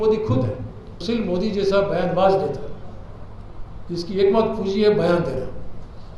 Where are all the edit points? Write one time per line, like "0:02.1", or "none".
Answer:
0:00.9